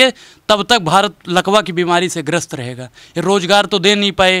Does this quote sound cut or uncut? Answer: uncut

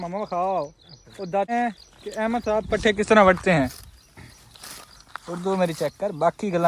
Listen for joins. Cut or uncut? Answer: cut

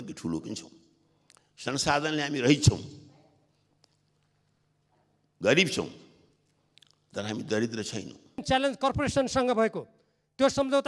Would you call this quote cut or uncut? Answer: cut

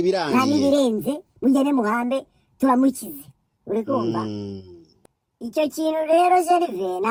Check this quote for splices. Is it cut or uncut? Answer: uncut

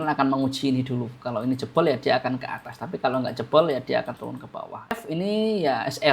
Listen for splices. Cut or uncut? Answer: cut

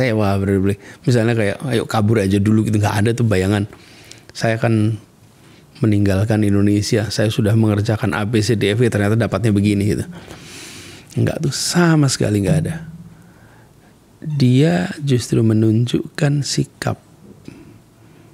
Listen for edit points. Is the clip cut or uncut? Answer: uncut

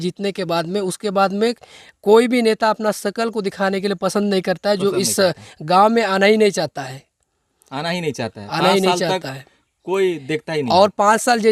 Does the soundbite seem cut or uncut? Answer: uncut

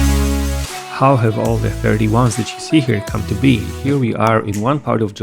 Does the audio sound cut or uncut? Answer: cut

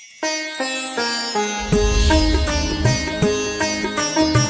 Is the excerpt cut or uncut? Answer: cut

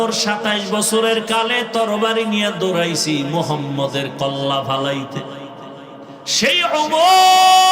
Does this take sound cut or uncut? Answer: cut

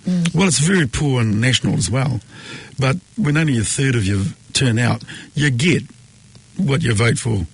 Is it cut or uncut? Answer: cut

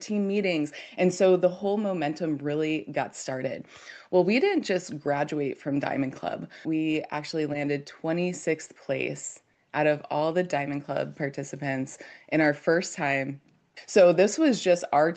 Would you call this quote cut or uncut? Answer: cut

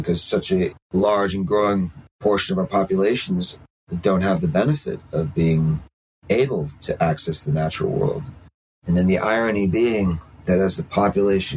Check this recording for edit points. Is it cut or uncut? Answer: cut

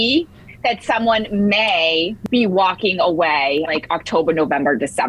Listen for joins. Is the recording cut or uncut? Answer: cut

